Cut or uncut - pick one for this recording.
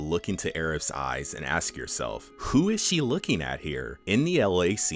cut